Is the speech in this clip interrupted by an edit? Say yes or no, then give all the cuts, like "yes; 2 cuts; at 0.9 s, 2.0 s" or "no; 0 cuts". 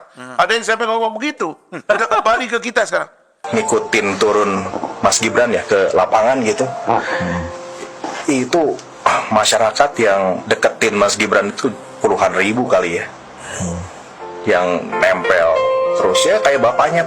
yes; 1 cut; at 3.4 s